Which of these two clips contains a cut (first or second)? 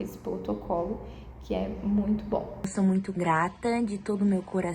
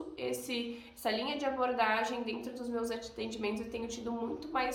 first